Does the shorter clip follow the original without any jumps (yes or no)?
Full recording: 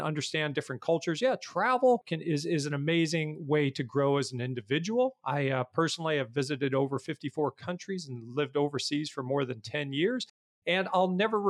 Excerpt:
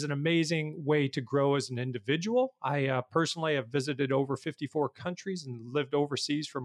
yes